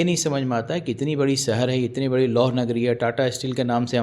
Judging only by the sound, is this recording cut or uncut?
uncut